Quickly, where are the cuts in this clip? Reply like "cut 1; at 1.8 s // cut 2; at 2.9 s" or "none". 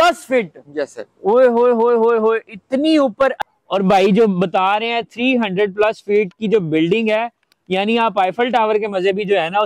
cut 1; at 3.4 s